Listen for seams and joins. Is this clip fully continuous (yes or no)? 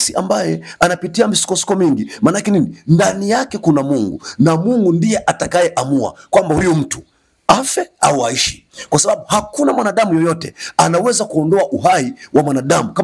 yes